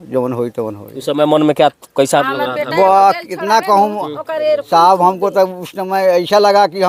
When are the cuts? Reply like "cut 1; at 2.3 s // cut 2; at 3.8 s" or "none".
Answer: none